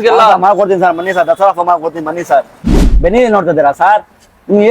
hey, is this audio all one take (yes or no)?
no